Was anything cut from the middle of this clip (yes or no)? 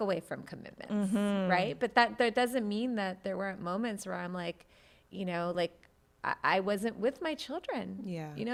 no